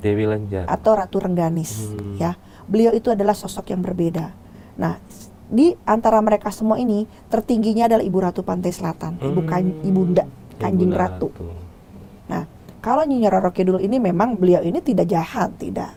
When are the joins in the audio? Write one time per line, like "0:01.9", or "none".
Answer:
none